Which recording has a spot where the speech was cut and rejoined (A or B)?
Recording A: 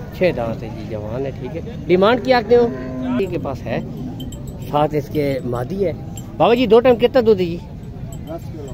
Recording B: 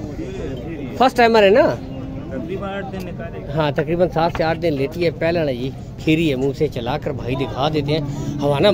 A